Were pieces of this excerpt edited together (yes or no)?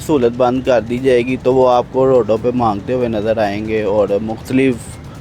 no